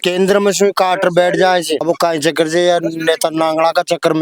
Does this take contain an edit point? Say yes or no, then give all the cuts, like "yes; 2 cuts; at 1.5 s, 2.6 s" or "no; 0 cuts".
no; 0 cuts